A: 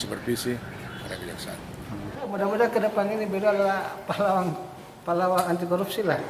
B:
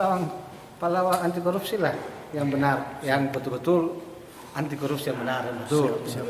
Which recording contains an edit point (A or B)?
A